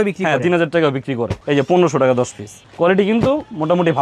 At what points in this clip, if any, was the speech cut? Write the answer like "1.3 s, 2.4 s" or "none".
1.4 s